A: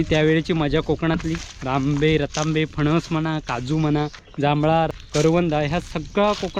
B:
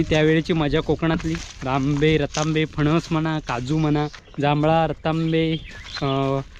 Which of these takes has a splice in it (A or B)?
A